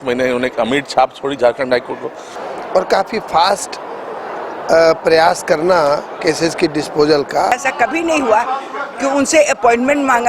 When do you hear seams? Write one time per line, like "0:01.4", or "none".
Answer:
0:02.3
0:07.6